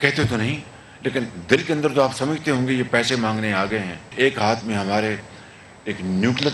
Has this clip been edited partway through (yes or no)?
yes